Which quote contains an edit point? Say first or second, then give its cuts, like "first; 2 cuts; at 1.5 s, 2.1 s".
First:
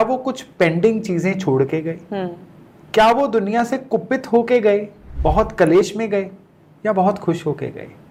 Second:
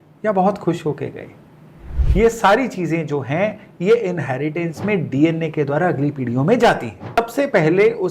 second; 1 cut; at 7.2 s